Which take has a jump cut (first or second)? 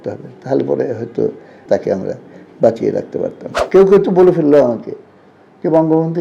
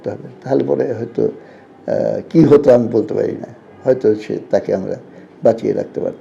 first